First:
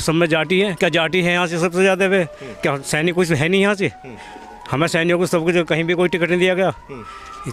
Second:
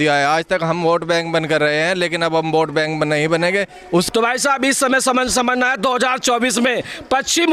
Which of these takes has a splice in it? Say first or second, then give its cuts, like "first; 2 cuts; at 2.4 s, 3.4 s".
second; 1 cut; at 4.1 s